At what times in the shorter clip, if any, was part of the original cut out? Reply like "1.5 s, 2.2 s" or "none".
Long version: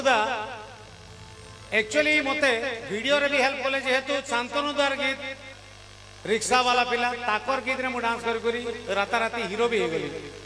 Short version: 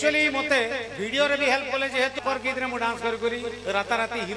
2.2 s